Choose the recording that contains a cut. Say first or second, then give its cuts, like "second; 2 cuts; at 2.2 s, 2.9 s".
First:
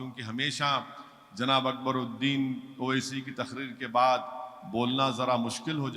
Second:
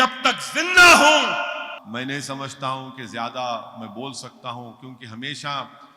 second; 1 cut; at 1.8 s